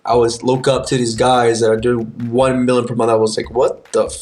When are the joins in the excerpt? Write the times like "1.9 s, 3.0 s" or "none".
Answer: none